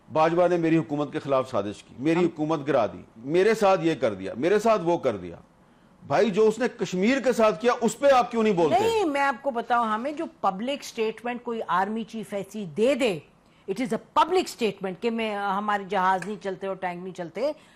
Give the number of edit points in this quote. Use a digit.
0